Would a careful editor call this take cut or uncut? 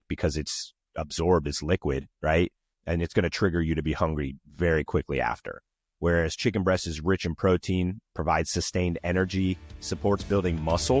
uncut